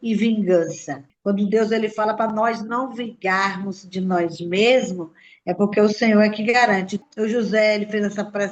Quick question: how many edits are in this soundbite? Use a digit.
2